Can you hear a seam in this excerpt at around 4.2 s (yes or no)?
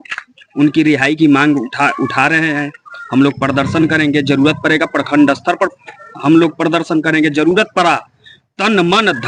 no